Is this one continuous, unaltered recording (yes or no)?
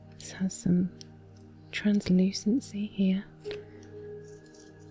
no